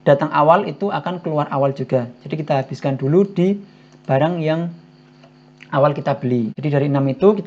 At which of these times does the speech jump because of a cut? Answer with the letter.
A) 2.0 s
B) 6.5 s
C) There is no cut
B